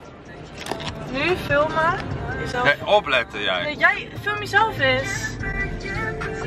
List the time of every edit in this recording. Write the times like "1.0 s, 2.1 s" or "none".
none